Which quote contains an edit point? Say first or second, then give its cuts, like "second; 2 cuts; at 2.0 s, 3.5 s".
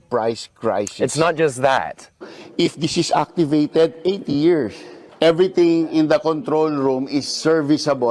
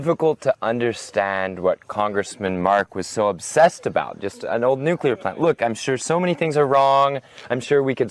first; 1 cut; at 2.4 s